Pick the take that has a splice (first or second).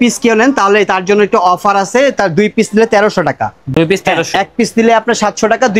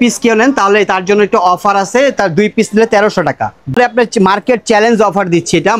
second